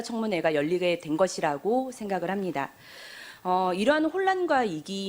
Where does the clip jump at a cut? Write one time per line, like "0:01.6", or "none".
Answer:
0:02.7